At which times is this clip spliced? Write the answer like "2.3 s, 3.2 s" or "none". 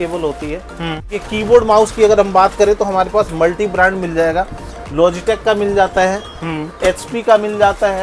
1.2 s